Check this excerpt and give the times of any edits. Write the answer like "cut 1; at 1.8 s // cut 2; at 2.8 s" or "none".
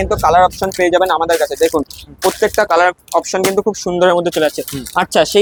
none